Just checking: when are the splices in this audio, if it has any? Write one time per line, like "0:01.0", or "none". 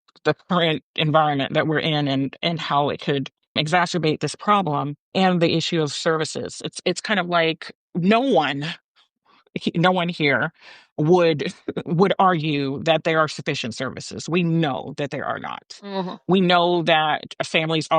0:03.6
0:05.1
0:07.7